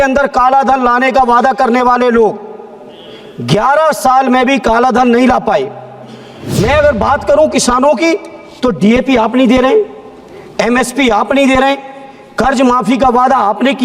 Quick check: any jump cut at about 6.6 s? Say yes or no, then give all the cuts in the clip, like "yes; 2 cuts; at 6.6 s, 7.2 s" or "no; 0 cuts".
yes; 1 cut; at 6.6 s